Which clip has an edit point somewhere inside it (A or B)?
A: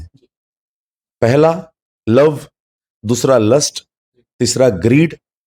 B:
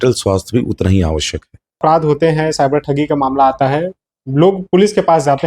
B